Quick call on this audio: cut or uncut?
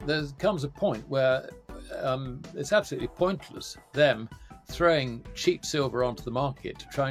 uncut